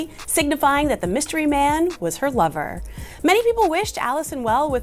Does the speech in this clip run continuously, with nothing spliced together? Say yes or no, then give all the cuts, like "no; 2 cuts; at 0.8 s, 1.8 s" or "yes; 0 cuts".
yes; 0 cuts